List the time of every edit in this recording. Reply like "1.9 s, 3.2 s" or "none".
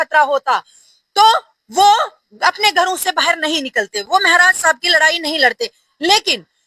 none